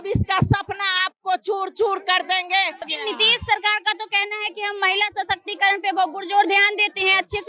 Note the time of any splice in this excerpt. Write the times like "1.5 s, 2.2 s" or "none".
2.9 s